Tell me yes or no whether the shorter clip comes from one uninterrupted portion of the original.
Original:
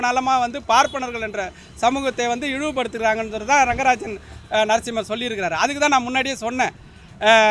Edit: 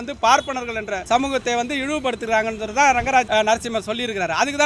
no